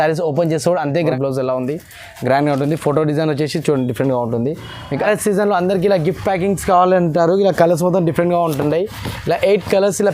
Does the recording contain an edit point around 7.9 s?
no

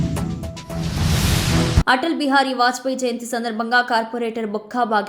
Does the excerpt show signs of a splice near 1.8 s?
yes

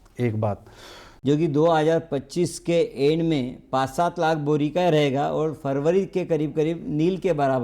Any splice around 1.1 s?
yes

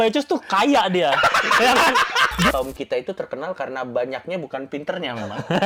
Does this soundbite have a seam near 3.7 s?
no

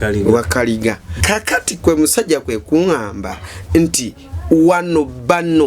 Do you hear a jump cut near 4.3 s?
no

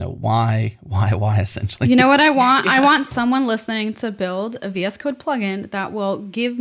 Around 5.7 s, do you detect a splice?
no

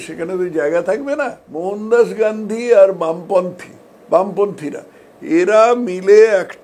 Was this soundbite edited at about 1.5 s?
yes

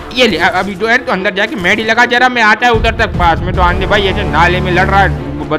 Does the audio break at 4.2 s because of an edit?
no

